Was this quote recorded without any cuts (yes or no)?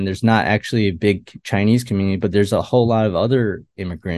yes